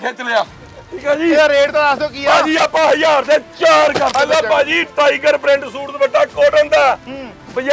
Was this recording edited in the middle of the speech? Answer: yes; 1 cut; at 4.2 s

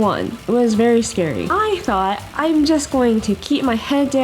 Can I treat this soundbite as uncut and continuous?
no; 1 cut; at 1.4 s

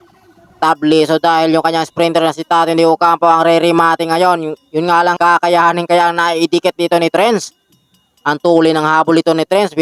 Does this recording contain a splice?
yes; 1 cut; at 5.2 s

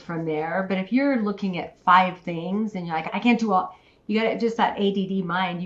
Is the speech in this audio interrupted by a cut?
yes; 1 cut; at 3.1 s

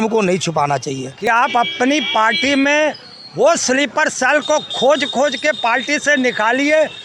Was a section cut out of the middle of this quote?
yes; 1 cut; at 1.3 s

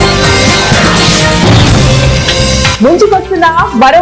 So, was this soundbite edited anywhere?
yes; 1 cut; at 2.4 s

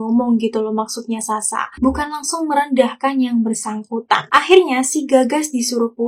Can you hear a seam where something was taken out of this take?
no; 0 cuts

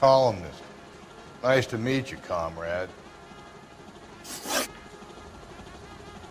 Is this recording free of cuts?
yes; 0 cuts

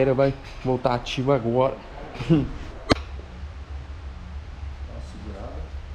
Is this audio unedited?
yes; 0 cuts

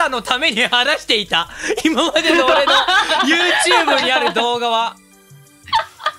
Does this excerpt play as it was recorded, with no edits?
yes; 0 cuts

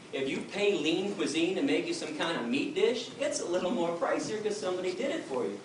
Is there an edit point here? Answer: no; 0 cuts

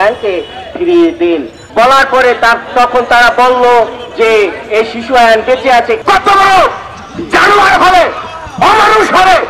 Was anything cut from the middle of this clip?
yes; 2 cuts; at 1.6 s, 6.0 s

